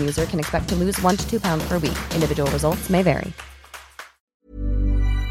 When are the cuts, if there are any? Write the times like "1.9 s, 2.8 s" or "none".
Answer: 4.3 s